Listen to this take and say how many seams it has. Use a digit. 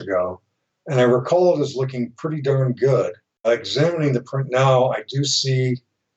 1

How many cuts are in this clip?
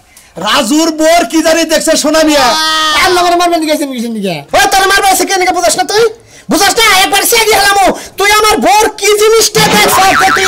1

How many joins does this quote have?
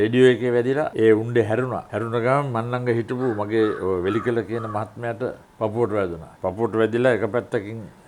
4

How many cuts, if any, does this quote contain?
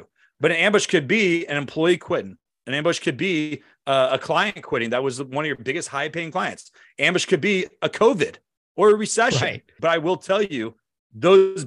1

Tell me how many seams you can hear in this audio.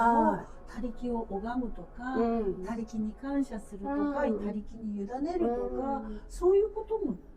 0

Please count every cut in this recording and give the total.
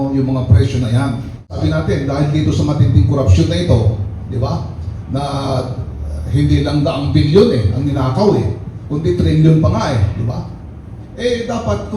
1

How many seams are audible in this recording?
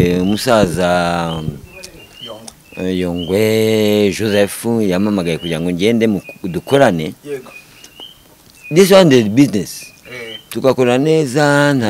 0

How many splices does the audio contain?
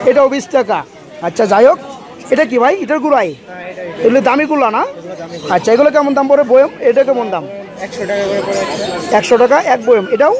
0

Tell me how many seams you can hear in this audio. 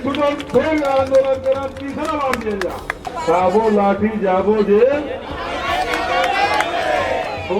1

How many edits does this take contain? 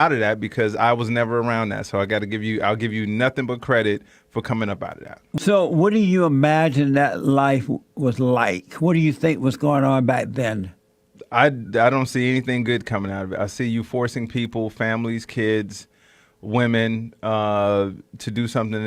1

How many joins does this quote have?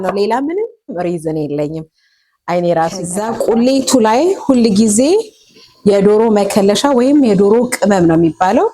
1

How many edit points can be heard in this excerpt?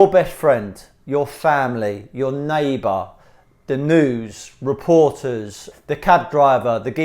1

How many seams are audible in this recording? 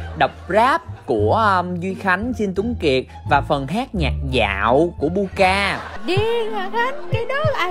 1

